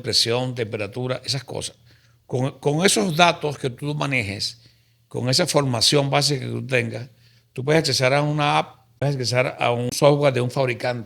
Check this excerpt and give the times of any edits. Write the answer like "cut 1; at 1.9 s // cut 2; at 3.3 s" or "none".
cut 1; at 9.0 s // cut 2; at 9.9 s